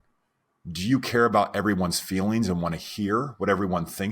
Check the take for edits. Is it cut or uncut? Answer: uncut